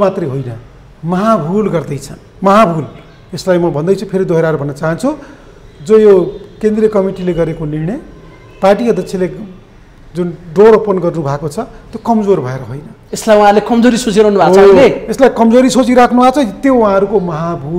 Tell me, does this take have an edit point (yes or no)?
no